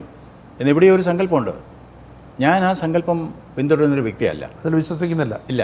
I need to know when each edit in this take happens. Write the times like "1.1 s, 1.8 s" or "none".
none